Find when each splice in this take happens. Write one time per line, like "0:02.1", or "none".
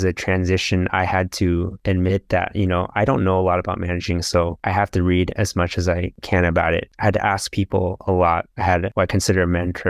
none